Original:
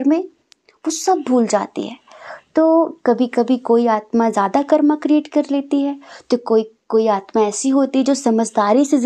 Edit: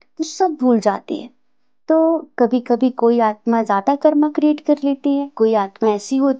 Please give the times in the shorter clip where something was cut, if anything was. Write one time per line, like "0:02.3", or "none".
0:05.3